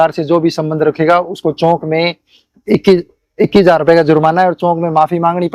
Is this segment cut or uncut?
uncut